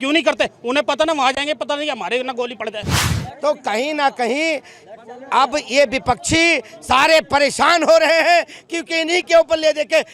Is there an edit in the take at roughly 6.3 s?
no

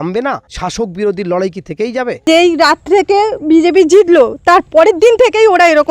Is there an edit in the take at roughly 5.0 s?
no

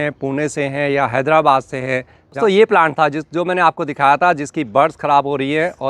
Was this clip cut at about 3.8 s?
no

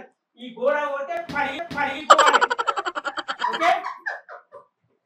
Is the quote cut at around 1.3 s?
no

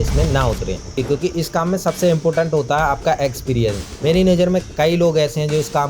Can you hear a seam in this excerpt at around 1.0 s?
yes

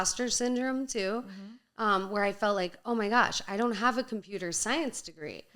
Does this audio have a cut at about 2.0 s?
no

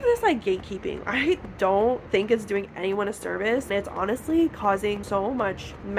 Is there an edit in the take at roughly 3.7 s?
yes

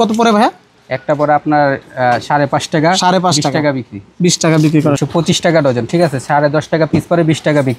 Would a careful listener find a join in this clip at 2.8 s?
no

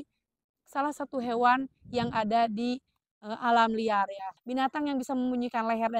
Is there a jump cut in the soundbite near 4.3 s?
yes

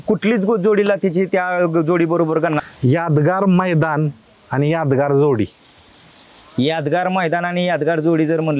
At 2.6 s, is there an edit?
yes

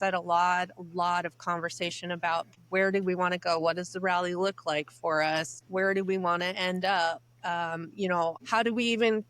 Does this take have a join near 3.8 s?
no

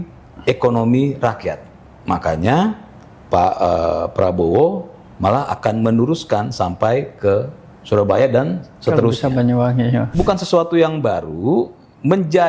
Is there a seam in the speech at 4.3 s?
no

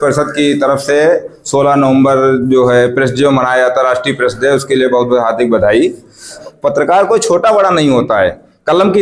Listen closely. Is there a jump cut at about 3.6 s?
no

